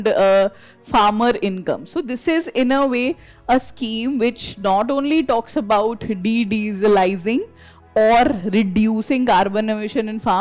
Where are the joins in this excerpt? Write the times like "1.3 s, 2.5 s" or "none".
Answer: none

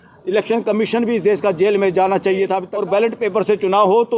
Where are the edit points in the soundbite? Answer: 2.7 s

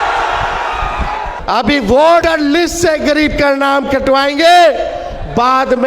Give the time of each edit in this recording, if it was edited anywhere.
1.3 s, 2.2 s

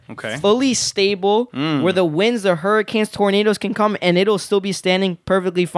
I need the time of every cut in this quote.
none

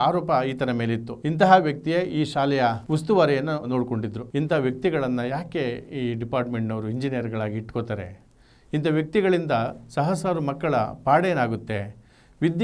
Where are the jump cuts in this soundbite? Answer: none

